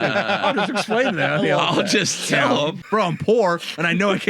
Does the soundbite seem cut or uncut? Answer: cut